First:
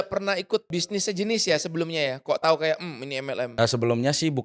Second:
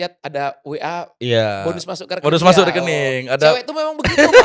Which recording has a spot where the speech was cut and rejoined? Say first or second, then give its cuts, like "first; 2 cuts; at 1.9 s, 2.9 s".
first; 2 cuts; at 1.1 s, 3.5 s